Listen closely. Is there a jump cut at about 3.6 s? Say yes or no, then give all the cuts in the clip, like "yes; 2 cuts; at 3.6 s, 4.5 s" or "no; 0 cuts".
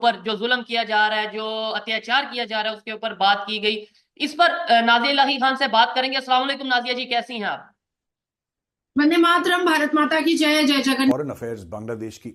no; 1 cut; at 11.1 s